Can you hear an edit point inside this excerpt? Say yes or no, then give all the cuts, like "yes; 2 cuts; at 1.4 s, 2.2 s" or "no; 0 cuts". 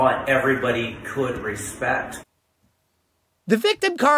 yes; 1 cut; at 2.2 s